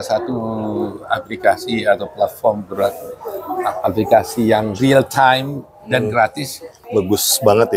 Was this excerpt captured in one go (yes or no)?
no